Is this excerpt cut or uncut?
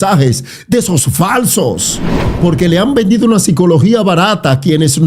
cut